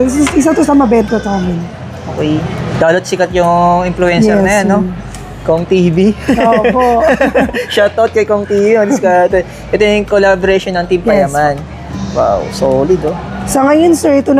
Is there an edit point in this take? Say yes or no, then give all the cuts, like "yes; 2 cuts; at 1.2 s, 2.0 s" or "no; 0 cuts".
no; 0 cuts